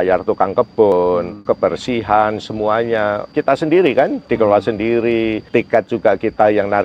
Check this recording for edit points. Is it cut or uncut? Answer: cut